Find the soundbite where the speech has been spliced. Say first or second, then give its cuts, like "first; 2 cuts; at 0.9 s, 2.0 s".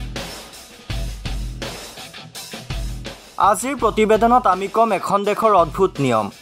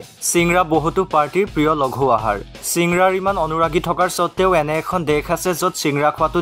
first; 1 cut; at 2.9 s